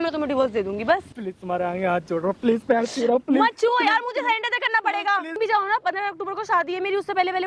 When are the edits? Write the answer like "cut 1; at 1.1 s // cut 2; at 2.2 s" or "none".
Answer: cut 1; at 1.1 s // cut 2; at 5.4 s